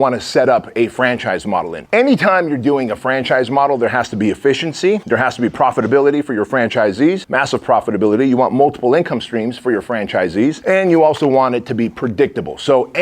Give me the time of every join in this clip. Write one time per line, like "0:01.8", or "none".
0:01.8
0:05.0
0:07.3
0:10.6